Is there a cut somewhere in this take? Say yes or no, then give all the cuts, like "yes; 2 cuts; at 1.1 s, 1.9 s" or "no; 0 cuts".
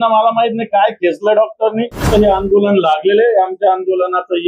yes; 1 cut; at 2.1 s